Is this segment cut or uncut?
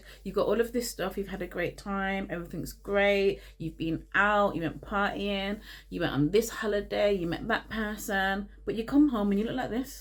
uncut